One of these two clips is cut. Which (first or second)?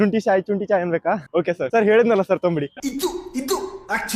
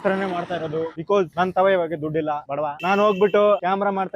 first